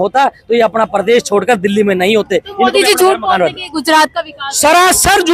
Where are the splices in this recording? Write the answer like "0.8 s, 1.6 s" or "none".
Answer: none